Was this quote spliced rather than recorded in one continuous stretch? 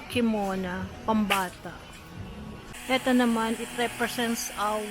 yes; 1 cut; at 2.7 s

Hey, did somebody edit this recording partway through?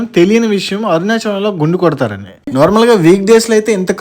yes; 1 cut; at 2.4 s

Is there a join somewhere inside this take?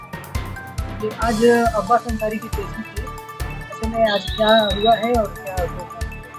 yes; 1 cut; at 1.0 s

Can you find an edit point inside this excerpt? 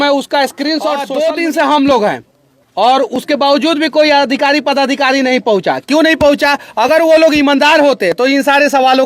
yes; 1 cut; at 1.1 s

